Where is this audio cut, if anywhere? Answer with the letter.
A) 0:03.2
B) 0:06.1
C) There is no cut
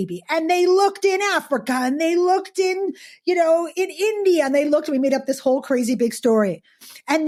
C